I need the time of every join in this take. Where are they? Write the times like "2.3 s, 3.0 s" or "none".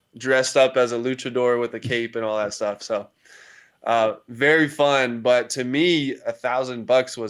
none